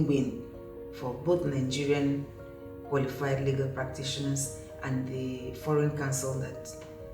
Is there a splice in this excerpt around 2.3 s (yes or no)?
no